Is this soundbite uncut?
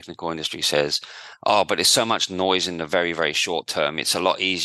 yes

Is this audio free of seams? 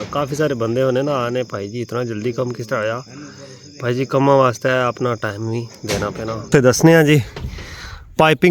no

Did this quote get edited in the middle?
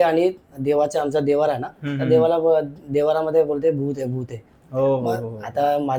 no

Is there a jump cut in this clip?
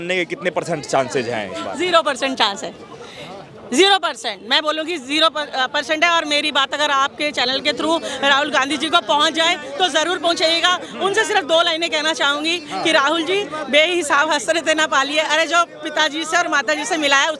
no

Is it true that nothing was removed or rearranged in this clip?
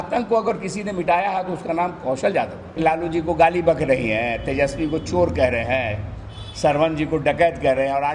no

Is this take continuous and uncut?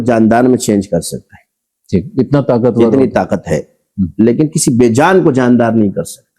yes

